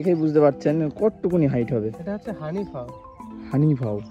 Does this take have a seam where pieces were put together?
no; 0 cuts

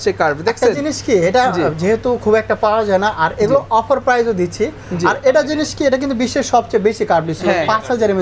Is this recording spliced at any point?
no; 0 cuts

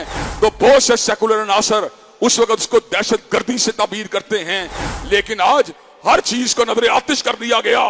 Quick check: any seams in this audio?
no; 0 cuts

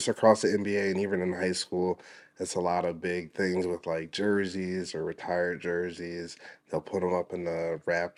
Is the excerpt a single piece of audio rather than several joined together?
yes; 0 cuts

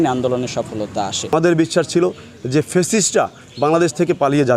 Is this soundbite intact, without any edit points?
no; 1 cut; at 1.3 s

